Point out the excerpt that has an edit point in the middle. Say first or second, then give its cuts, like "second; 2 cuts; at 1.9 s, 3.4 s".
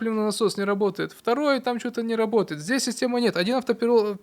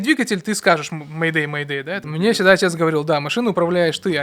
second; 1 cut; at 2.0 s